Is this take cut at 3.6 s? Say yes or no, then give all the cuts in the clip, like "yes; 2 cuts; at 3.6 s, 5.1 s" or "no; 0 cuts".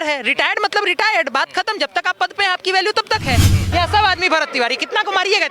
yes; 1 cut; at 3.6 s